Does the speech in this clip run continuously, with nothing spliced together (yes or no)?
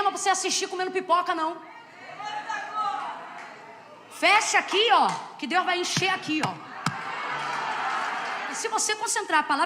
no